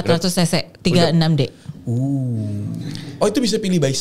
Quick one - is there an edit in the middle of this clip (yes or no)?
no